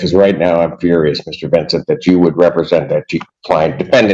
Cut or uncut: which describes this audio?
uncut